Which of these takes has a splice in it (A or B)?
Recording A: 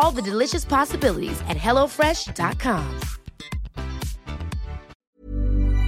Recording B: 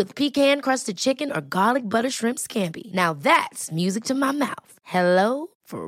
A